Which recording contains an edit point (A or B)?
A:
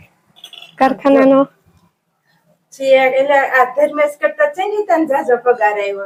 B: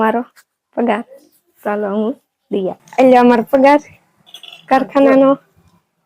B